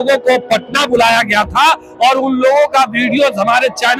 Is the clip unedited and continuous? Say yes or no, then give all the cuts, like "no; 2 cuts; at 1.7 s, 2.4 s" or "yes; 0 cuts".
yes; 0 cuts